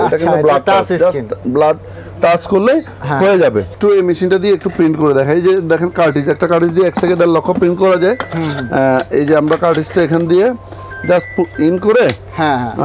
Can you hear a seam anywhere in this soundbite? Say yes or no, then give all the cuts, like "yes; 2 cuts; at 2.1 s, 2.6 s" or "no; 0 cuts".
no; 0 cuts